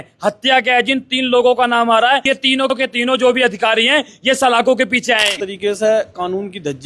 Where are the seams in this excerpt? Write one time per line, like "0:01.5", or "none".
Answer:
0:02.4
0:05.4